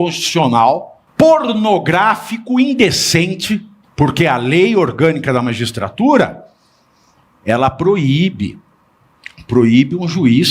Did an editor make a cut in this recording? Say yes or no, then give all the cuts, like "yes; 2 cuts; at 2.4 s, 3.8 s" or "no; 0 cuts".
yes; 2 cuts; at 1.0 s, 3.8 s